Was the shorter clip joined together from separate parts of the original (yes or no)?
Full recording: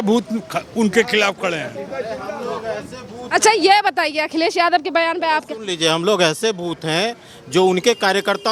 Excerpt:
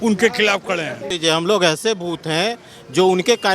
yes